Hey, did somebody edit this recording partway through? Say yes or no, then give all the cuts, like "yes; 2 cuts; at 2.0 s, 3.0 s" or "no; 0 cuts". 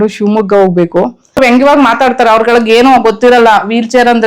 yes; 1 cut; at 1.5 s